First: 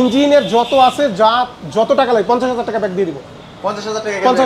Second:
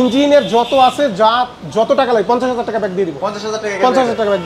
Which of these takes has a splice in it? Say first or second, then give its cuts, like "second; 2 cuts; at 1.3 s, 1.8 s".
second; 1 cut; at 3.1 s